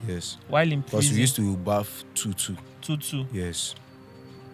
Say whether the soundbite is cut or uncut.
uncut